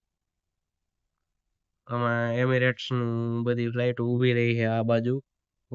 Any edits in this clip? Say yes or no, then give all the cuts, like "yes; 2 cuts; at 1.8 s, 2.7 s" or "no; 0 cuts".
no; 0 cuts